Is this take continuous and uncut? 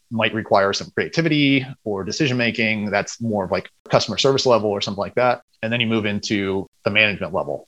no; 3 cuts; at 3.9 s, 5.5 s, 6.7 s

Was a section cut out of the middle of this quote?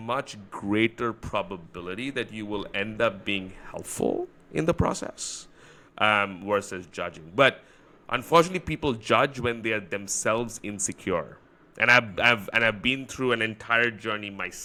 no; 0 cuts

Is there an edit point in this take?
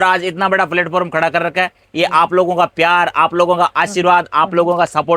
no; 0 cuts

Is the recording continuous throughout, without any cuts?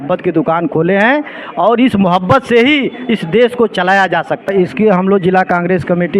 no; 1 cut; at 4.5 s

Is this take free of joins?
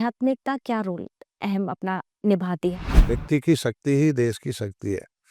no; 1 cut; at 3.1 s

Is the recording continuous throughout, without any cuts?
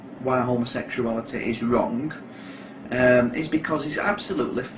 yes; 0 cuts

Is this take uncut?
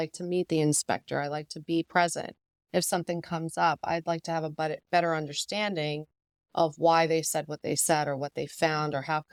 yes; 0 cuts

